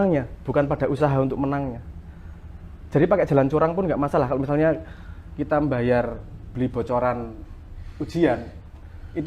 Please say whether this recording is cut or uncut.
uncut